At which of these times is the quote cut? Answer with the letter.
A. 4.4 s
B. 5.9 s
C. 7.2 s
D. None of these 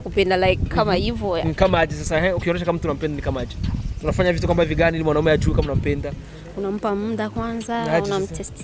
D